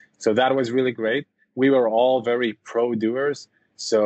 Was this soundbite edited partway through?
no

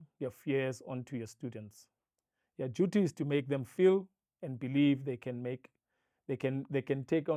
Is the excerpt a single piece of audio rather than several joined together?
yes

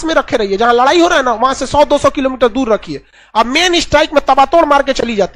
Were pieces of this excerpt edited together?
no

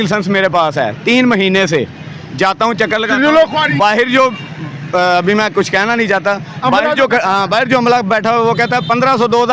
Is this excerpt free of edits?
yes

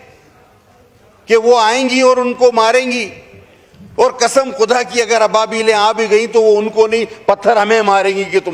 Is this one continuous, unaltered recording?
yes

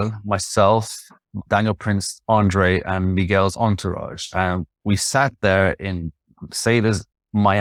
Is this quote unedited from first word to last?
yes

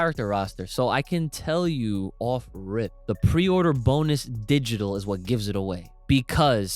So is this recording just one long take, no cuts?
no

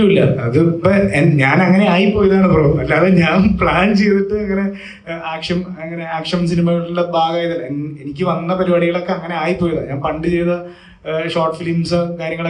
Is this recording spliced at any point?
no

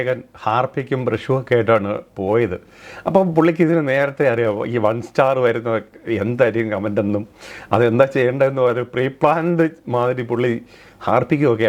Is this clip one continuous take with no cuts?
yes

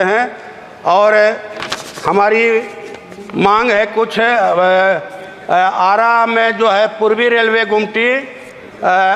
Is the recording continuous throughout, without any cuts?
yes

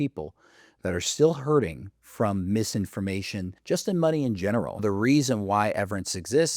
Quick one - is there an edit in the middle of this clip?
yes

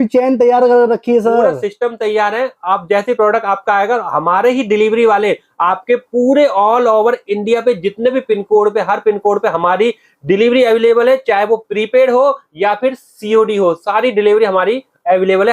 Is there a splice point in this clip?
no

